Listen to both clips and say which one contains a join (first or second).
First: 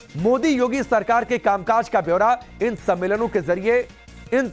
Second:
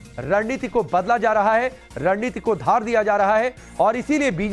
first